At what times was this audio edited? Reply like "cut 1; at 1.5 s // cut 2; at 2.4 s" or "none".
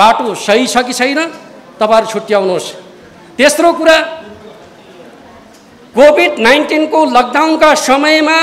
none